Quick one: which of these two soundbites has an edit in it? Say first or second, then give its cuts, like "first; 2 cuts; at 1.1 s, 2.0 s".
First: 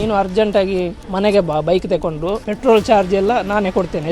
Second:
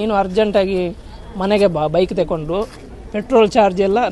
first; 2 cuts; at 1.0 s, 2.5 s